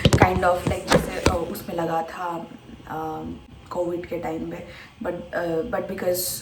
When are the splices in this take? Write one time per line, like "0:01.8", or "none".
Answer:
none